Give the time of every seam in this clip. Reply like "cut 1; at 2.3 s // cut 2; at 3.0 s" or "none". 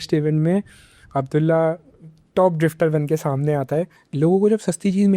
cut 1; at 4.0 s